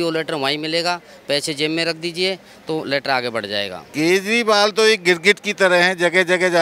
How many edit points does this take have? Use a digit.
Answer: 1